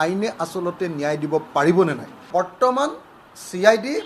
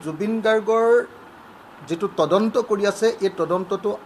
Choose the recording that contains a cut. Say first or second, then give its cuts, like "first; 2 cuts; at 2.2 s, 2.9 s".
first; 1 cut; at 2.3 s